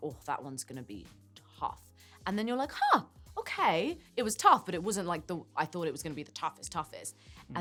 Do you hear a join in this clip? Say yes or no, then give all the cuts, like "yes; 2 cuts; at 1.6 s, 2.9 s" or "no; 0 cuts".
no; 0 cuts